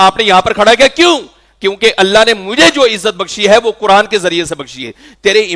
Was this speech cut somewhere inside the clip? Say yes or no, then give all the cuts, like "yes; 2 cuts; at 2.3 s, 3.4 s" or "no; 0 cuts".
no; 0 cuts